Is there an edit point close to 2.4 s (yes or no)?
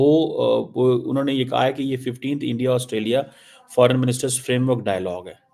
no